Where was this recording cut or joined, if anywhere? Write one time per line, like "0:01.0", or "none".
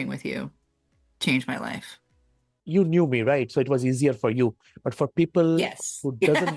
0:02.6